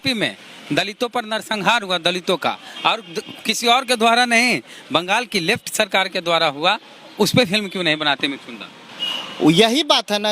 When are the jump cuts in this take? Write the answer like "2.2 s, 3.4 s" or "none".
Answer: none